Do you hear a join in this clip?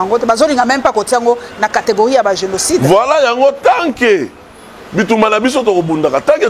no; 0 cuts

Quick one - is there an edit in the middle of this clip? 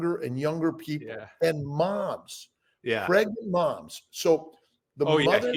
no; 0 cuts

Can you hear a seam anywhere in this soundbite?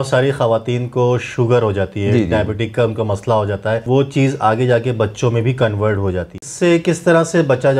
yes; 2 cuts; at 3.8 s, 6.4 s

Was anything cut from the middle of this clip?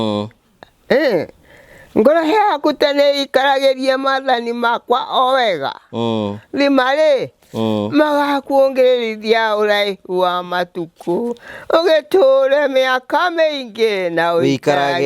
no; 0 cuts

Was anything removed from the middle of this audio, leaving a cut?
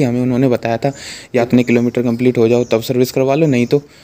yes; 1 cut; at 1.5 s

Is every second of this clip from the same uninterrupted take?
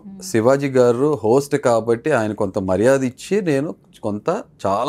yes; 0 cuts

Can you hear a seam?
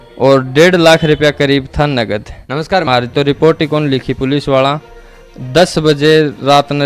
yes; 1 cut; at 2.9 s

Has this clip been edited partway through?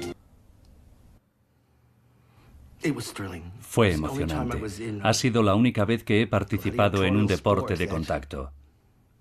no; 0 cuts

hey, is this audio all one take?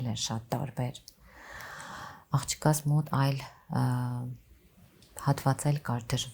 yes; 0 cuts

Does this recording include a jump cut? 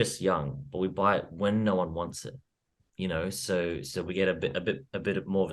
no; 0 cuts

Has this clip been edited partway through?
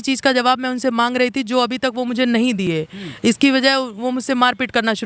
no; 0 cuts

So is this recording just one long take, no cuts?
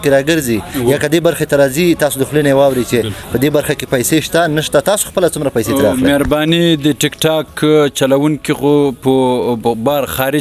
yes; 0 cuts

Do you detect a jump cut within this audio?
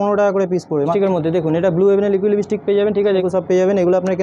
yes; 2 cuts; at 0.9 s, 3.2 s

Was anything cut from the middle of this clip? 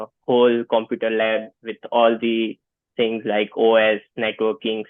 no; 0 cuts

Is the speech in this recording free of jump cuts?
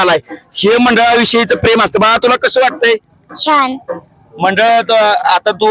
yes; 0 cuts

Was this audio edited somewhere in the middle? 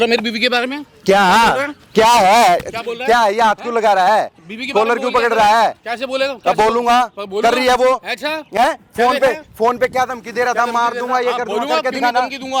no; 0 cuts

